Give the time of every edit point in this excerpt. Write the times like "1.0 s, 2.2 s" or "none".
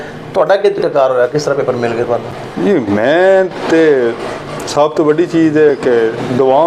none